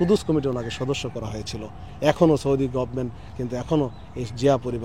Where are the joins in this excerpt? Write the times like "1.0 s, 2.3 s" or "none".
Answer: none

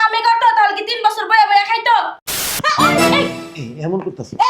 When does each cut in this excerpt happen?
2.4 s

